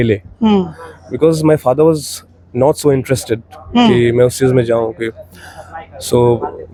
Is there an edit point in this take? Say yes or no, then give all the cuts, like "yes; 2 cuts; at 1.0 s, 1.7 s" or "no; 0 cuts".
no; 0 cuts